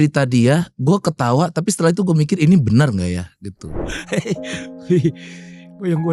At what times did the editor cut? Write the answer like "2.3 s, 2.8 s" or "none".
3.9 s